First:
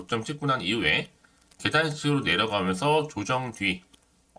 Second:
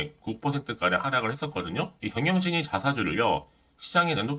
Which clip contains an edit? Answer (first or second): second